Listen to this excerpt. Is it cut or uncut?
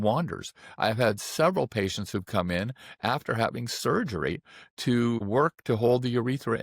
cut